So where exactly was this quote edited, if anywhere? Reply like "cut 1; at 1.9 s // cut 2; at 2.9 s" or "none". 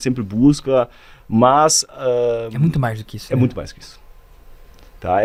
none